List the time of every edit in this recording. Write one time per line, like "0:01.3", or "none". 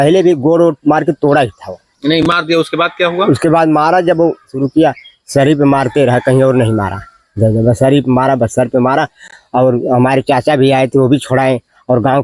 0:04.5